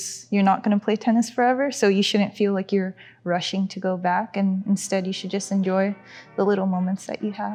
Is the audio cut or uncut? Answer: uncut